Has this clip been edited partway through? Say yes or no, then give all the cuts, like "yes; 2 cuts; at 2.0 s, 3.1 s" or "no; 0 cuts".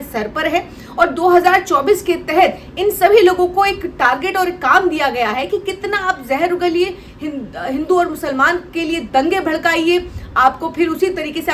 no; 0 cuts